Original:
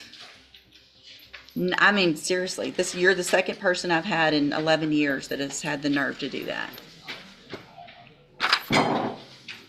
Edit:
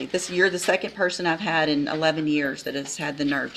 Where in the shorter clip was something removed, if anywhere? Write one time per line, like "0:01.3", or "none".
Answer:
none